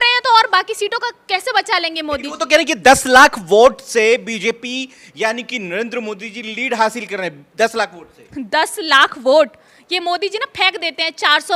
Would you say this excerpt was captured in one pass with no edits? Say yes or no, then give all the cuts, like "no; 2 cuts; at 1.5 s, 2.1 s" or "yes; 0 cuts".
yes; 0 cuts